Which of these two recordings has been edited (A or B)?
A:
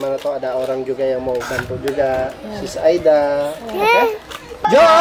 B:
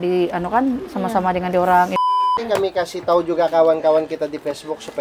B